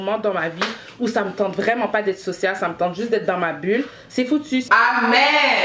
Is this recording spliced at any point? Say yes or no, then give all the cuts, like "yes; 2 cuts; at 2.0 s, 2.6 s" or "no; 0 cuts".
yes; 1 cut; at 4.7 s